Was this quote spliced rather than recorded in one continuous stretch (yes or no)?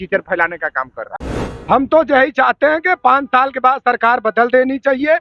yes